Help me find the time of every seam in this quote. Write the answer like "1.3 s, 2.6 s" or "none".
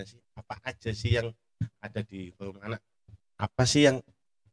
2.9 s